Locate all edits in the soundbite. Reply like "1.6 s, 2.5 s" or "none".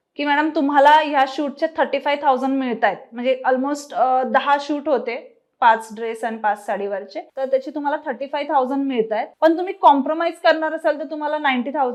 none

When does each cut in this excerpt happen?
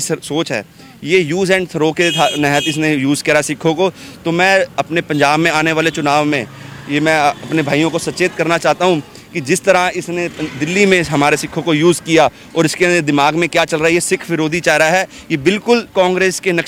none

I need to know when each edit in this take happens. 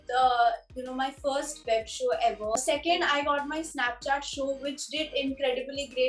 2.6 s

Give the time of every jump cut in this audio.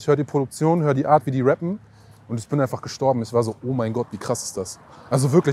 none

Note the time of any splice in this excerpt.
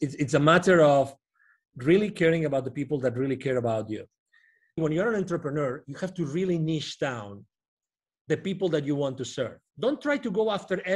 4.8 s, 9.6 s

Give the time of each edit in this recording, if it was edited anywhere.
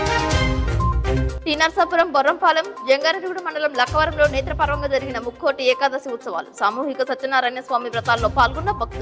1.1 s

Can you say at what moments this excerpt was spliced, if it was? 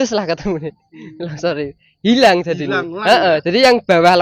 none

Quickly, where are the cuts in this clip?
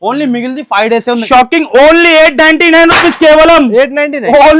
1.2 s

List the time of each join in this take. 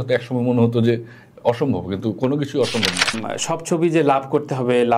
3.3 s

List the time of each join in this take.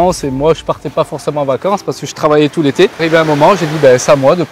3.0 s

